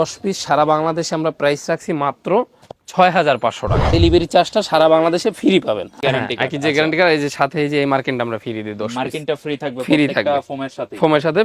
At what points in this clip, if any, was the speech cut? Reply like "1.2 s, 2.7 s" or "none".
3.9 s, 5.9 s